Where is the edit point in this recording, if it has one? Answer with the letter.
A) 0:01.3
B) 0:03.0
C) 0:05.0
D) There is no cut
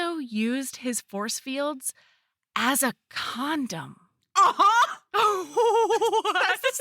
C